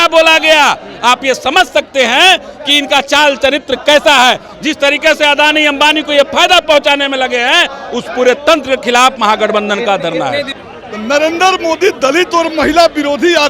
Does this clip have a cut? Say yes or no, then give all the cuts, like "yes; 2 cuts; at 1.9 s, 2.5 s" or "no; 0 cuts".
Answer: yes; 1 cut; at 10.5 s